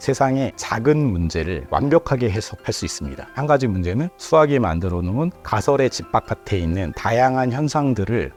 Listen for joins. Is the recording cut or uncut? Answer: uncut